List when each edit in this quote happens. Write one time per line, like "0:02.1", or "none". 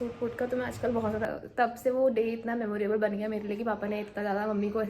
0:01.3